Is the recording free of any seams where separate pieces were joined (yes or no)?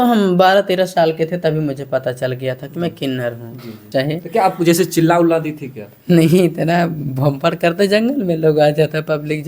no